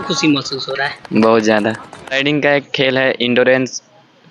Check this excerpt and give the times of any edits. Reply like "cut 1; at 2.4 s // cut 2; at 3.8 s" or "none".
cut 1; at 2.2 s